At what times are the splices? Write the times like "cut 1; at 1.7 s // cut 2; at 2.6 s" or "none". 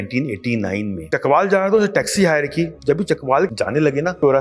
cut 1; at 1.0 s // cut 2; at 2.8 s // cut 3; at 3.6 s